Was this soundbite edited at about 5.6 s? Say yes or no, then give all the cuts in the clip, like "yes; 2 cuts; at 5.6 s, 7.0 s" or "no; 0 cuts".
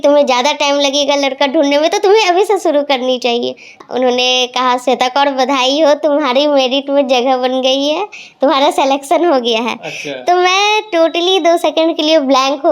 no; 1 cut; at 3.8 s